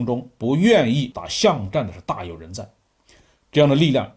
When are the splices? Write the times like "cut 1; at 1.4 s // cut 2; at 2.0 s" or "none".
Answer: cut 1; at 1.2 s